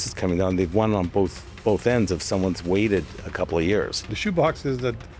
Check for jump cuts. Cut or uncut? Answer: cut